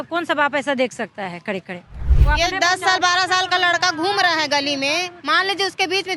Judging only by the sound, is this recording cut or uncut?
cut